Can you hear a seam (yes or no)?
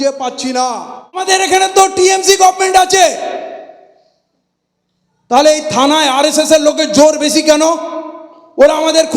yes